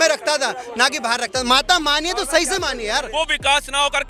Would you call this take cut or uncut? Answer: cut